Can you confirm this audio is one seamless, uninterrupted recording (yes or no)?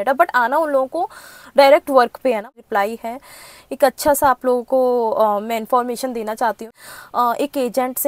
no